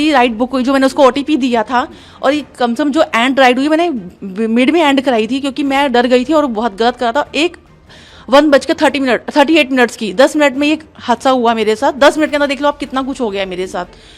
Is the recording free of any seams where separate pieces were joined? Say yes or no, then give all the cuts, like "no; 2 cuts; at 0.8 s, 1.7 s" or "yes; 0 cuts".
yes; 0 cuts